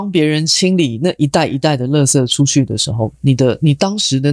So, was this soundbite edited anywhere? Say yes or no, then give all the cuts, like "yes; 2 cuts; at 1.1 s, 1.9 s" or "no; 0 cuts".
no; 0 cuts